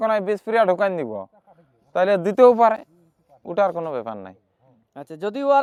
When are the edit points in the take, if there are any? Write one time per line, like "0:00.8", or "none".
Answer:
none